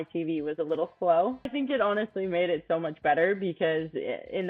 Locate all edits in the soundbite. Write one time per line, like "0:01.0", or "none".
0:01.5